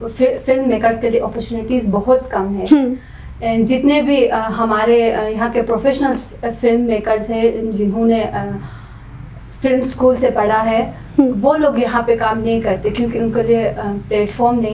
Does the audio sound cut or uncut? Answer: uncut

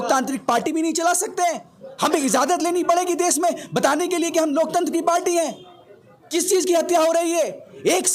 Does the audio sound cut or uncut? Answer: uncut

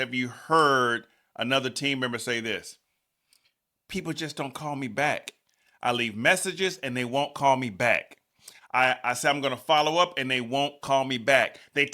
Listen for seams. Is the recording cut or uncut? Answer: uncut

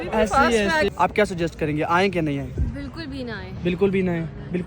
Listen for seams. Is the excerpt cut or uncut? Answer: cut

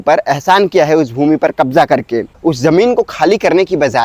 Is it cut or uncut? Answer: cut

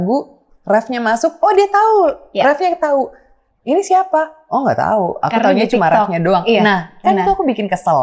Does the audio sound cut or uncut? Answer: uncut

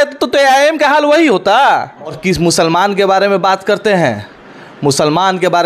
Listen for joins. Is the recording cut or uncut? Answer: cut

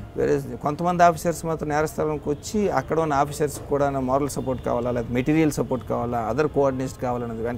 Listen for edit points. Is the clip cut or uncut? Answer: uncut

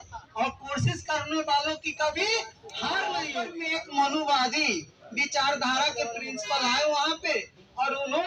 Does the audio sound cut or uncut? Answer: cut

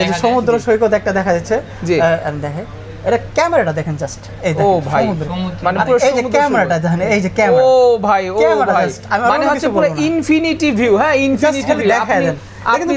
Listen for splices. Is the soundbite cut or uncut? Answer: uncut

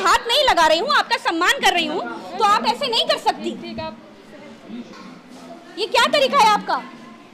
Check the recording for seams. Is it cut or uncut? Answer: cut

